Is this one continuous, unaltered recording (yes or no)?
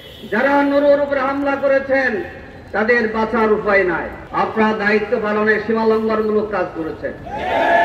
no